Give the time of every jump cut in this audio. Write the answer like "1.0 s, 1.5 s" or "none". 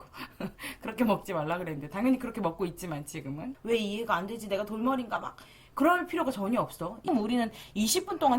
3.5 s, 7.1 s